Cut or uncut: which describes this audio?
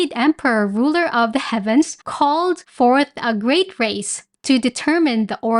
cut